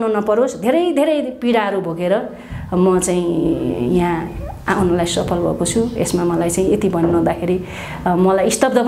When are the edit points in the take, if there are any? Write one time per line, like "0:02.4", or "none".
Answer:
none